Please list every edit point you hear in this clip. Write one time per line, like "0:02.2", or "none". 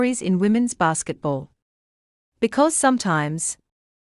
none

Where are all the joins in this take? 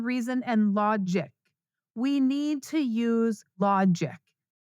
0:03.5

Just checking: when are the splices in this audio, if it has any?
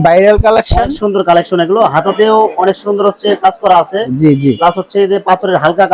none

